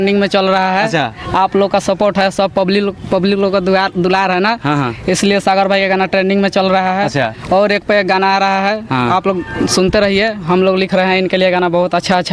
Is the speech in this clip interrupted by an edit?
no; 0 cuts

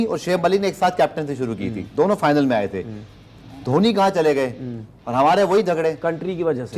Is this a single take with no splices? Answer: yes; 0 cuts

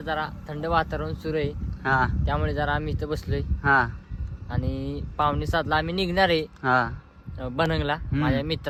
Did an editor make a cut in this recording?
no; 0 cuts

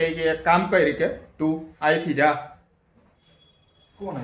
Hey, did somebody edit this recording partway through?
no; 0 cuts

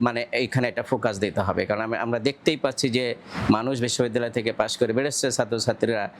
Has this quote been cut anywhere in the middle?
no; 0 cuts

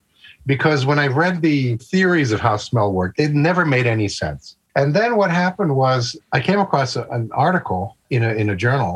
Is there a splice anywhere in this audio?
yes; 2 cuts; at 3.1 s, 7.0 s

